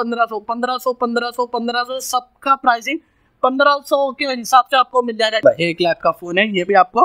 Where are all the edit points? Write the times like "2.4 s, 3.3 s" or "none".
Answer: 5.4 s